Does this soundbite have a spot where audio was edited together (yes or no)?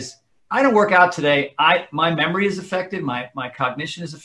no